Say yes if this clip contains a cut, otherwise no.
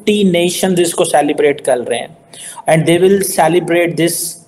no